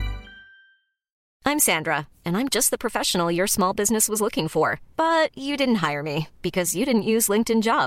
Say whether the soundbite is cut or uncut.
cut